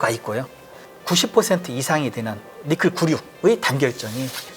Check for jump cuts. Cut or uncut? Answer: cut